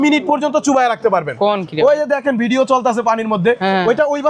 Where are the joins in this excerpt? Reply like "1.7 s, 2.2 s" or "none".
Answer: none